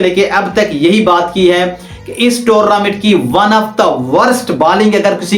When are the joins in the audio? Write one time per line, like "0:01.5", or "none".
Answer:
none